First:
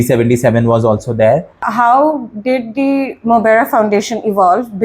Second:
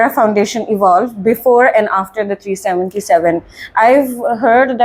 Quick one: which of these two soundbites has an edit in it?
first; 1 cut; at 1.6 s

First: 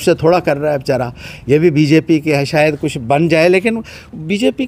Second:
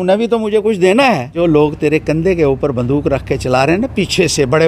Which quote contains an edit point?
second; 1 cut; at 1.4 s

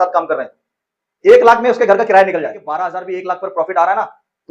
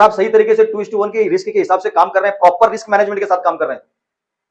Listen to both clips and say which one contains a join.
first; 1 cut; at 2.6 s

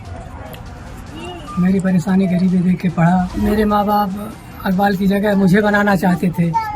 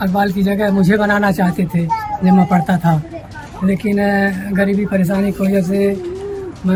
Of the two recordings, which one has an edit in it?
first; 1 cut; at 3.3 s

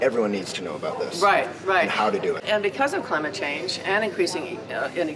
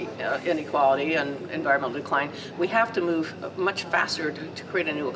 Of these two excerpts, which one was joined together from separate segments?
first; 1 cut; at 2.4 s

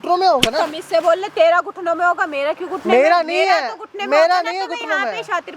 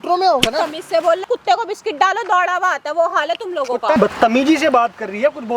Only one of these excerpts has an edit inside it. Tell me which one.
second; 2 cuts; at 1.2 s, 4.0 s

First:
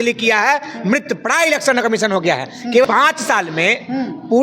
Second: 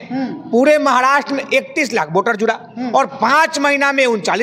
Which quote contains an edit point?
first; 1 cut; at 2.9 s

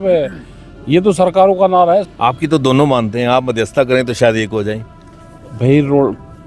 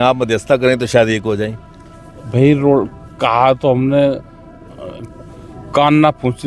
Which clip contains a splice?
first; 1 cut; at 2.1 s

